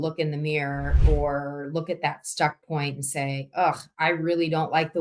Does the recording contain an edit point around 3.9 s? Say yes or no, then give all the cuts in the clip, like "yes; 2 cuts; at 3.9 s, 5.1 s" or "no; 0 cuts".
no; 0 cuts